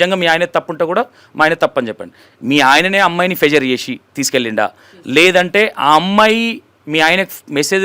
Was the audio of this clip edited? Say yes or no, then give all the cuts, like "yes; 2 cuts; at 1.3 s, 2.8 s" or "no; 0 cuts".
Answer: no; 0 cuts